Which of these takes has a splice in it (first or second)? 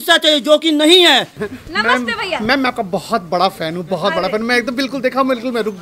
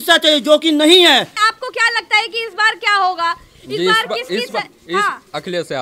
first